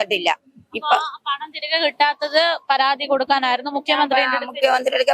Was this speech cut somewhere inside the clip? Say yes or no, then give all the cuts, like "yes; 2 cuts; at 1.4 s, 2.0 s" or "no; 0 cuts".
no; 0 cuts